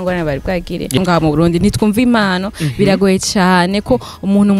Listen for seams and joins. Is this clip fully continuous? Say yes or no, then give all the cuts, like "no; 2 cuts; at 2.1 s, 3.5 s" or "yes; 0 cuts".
no; 1 cut; at 0.9 s